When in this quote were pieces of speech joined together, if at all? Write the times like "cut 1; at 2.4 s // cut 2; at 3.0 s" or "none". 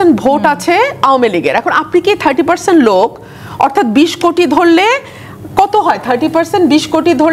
none